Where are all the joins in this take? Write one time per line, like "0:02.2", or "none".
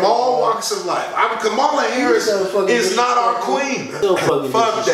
0:03.9

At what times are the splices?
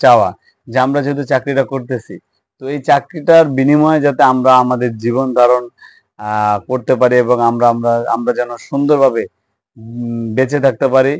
none

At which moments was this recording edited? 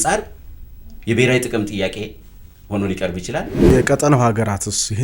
0:03.7

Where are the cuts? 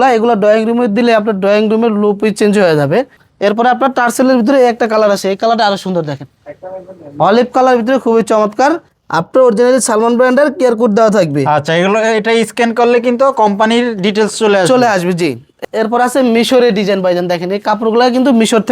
0:03.2
0:08.9
0:15.5

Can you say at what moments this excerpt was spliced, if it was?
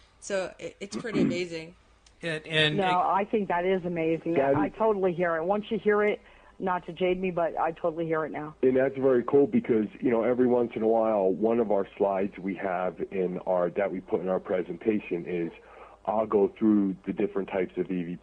0:10.9

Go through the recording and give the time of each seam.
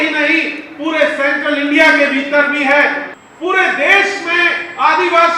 0:03.0

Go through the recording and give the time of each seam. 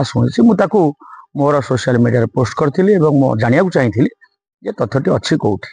none

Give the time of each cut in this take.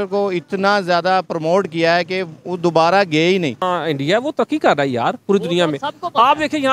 0:03.6

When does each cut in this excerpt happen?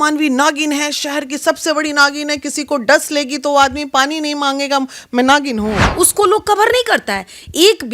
0:05.9

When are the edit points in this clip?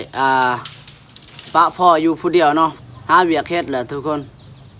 0:02.8

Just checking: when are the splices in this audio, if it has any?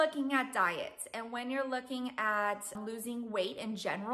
0:02.8

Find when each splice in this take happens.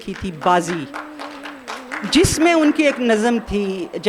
none

